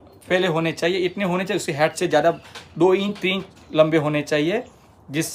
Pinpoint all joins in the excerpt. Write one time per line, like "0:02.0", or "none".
none